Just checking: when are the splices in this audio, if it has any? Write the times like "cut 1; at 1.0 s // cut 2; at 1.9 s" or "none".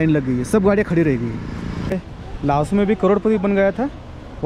cut 1; at 1.9 s